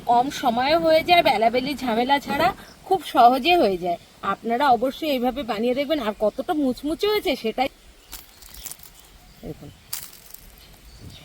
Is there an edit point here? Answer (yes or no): yes